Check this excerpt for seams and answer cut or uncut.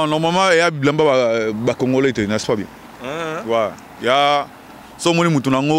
uncut